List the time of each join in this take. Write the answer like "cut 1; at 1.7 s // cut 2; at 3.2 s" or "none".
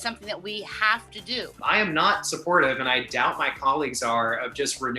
cut 1; at 1.6 s